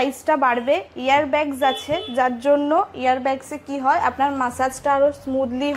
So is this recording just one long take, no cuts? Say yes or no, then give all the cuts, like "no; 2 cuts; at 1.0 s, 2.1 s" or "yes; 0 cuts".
yes; 0 cuts